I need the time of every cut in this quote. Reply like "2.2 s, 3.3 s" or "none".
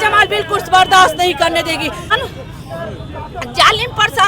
2.1 s